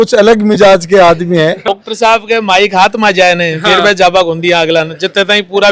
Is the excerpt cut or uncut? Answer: cut